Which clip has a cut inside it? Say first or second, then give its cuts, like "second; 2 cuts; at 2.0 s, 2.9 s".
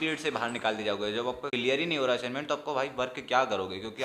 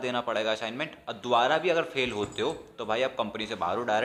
first; 1 cut; at 1.5 s